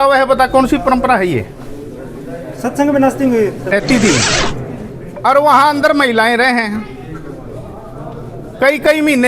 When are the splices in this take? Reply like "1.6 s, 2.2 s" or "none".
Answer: 3.7 s